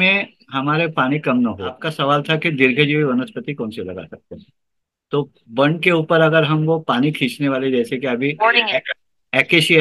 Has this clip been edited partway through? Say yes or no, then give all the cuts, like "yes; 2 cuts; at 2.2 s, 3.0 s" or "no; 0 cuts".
yes; 1 cut; at 1.9 s